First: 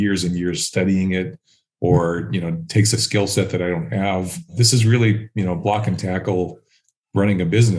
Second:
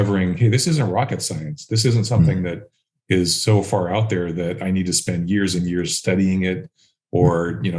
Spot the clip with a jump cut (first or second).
first